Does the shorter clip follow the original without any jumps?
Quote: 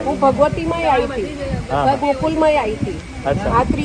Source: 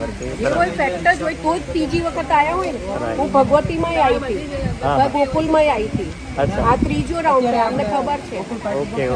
yes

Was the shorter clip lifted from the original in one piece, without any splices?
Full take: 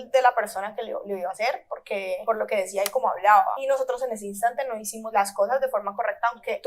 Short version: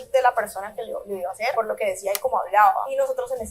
no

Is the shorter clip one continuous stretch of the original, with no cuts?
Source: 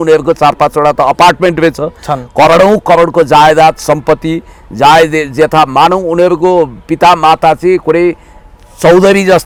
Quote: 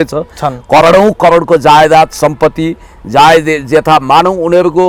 yes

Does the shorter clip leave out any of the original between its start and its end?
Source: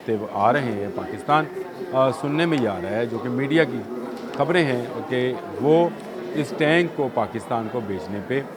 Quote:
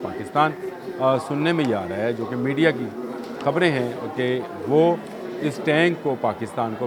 no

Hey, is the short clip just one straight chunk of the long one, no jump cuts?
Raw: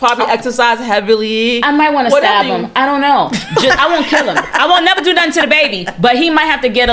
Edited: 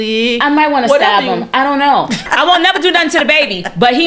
no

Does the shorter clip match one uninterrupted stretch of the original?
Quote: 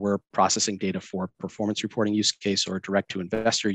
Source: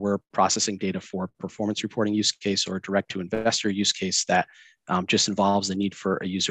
yes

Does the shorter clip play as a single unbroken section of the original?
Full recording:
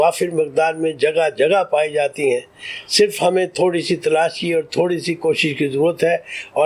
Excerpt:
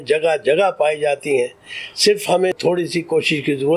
no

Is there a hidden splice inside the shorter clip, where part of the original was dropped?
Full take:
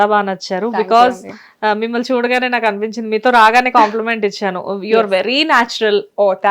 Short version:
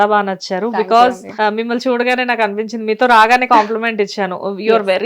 yes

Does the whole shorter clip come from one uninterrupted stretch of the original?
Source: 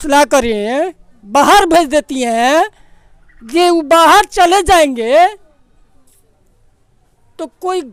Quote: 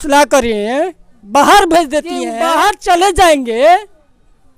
no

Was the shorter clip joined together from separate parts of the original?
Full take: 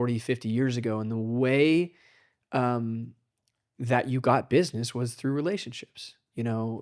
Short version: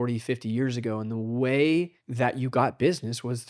yes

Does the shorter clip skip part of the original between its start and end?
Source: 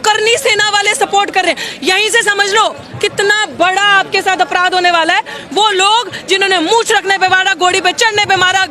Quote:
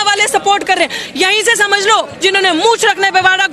yes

